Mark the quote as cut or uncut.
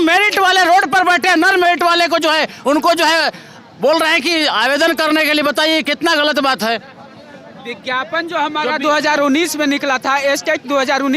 uncut